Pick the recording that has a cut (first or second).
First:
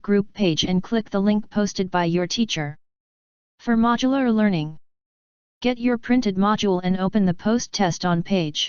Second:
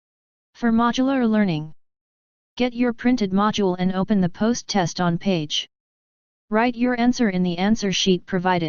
second